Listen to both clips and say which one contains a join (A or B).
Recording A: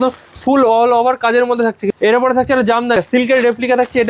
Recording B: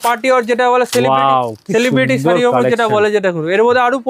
A